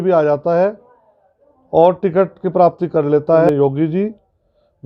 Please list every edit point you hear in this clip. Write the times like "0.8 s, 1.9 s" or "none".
3.5 s